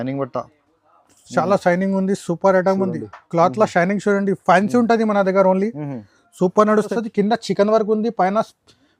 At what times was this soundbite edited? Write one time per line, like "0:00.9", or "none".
0:06.9